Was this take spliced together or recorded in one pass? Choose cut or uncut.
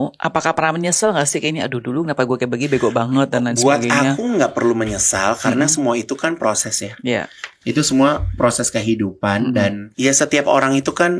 cut